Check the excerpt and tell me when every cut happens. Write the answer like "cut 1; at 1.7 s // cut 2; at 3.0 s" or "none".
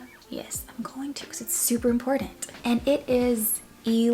none